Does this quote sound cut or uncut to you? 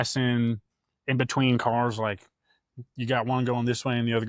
uncut